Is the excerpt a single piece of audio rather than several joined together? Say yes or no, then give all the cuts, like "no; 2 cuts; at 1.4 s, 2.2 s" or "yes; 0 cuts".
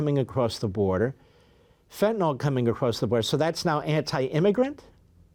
yes; 0 cuts